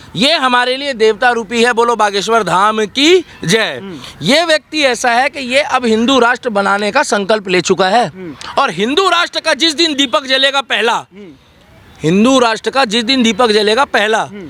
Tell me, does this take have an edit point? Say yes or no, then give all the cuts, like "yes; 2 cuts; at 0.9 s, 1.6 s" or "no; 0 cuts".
no; 0 cuts